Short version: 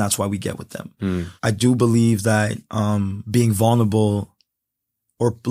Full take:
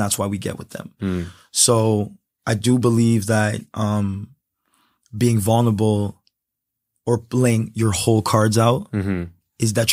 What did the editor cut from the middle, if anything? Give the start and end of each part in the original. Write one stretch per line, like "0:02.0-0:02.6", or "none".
0:01.3-0:02.3
0:04.2-0:05.0